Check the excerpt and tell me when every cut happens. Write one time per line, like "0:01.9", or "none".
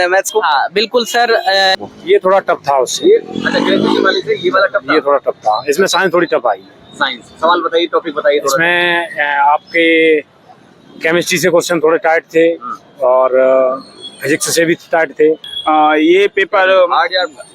0:01.8
0:15.5